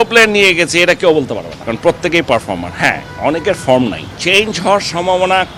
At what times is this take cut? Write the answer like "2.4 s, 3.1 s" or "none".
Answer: 1.5 s, 4.1 s

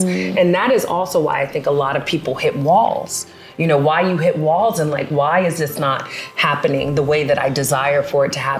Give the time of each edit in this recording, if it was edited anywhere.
none

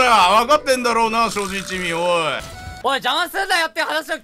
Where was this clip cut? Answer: 2.4 s

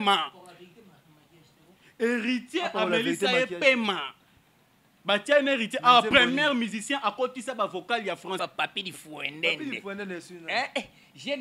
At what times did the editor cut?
8.4 s

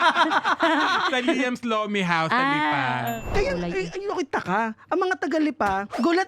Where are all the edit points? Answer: 3.3 s

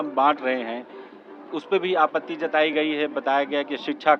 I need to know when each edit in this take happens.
none

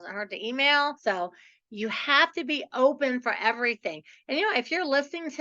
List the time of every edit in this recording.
1.0 s

